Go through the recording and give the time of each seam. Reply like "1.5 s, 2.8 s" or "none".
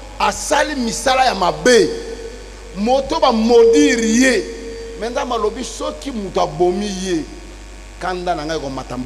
none